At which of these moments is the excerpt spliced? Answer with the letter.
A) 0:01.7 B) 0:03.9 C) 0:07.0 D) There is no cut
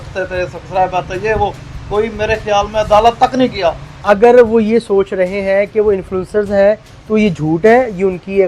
B